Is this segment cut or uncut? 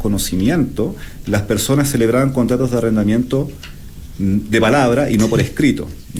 uncut